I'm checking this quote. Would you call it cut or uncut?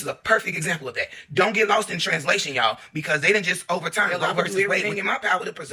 cut